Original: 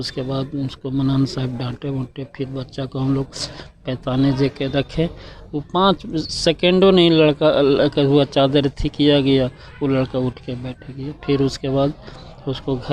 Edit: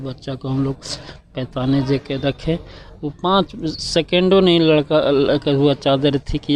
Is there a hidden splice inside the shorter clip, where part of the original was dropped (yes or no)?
no